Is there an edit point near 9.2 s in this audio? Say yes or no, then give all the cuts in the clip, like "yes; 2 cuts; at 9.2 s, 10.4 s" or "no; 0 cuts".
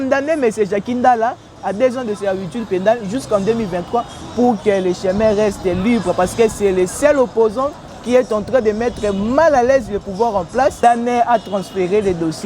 no; 1 cut; at 10.8 s